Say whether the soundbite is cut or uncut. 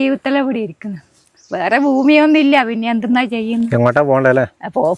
uncut